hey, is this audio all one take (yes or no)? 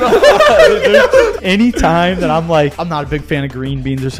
no